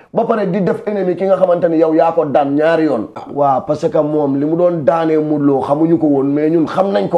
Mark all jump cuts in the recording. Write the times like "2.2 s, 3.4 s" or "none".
3.2 s

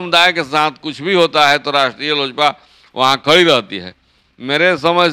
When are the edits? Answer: none

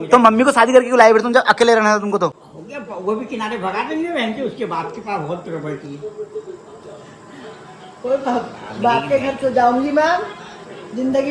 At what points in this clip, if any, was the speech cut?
none

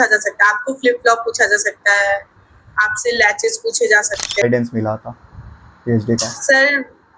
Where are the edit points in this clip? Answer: 4.4 s

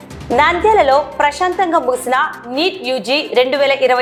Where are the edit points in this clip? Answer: none

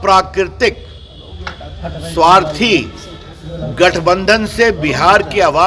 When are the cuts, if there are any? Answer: none

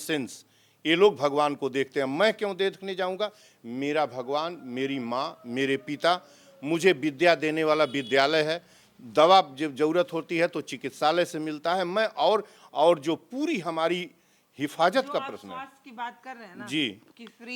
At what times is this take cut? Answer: none

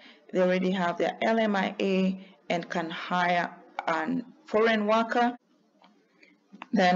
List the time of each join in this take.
5.5 s

